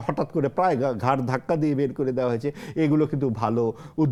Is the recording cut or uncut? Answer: uncut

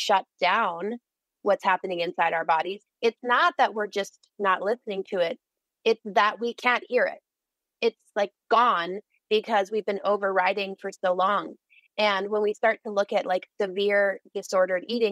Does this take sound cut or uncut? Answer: uncut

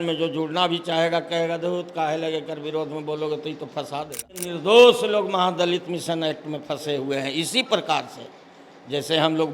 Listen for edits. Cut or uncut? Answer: cut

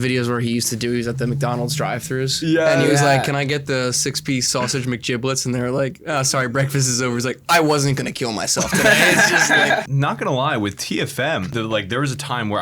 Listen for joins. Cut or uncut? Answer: cut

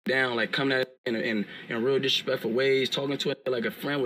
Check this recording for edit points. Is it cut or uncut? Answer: uncut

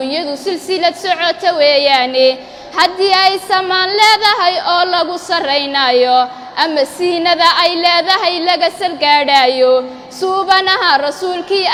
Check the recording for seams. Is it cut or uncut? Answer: uncut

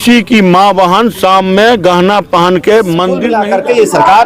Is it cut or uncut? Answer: cut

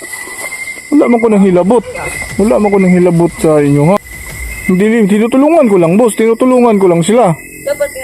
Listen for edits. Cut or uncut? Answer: cut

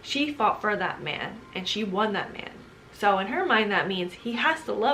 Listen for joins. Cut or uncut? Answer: uncut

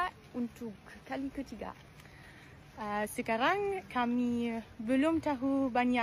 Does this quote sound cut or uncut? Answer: uncut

